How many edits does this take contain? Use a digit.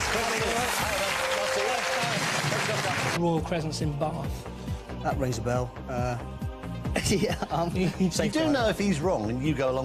0